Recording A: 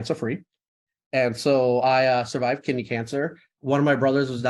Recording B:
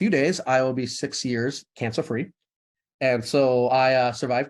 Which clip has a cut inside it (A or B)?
A